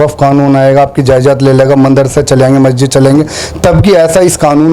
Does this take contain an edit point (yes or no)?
no